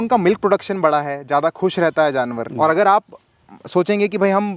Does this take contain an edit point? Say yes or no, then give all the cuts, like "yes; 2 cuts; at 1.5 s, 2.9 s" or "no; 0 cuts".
yes; 1 cut; at 2.5 s